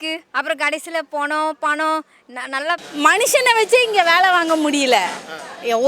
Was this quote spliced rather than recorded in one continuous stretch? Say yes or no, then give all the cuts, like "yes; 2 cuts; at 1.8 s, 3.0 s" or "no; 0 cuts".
yes; 1 cut; at 2.9 s